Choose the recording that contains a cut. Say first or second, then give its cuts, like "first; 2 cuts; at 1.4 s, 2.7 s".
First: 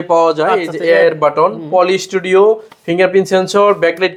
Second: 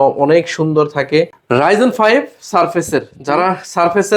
second; 1 cut; at 1.3 s